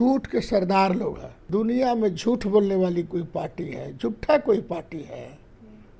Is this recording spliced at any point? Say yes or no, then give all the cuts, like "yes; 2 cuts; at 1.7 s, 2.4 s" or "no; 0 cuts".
yes; 1 cut; at 1.5 s